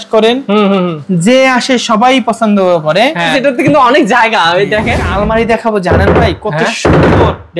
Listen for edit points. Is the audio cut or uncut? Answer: cut